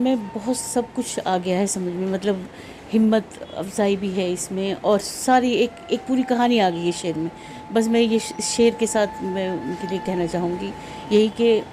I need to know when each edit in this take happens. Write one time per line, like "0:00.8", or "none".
none